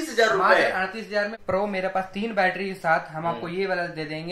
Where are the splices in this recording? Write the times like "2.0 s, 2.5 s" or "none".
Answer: 1.4 s